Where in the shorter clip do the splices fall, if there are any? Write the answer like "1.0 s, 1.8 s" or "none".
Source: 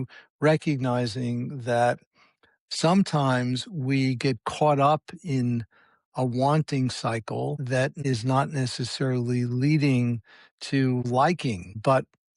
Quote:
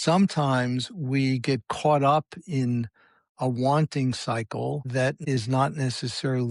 none